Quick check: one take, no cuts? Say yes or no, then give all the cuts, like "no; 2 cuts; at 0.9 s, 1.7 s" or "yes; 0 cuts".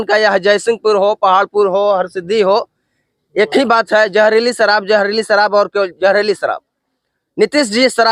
yes; 0 cuts